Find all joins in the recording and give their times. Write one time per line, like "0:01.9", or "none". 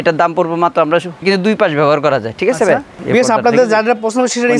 0:01.2
0:02.9